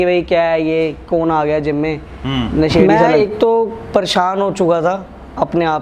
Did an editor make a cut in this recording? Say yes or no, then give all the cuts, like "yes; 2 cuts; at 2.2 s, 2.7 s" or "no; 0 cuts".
yes; 1 cut; at 2.8 s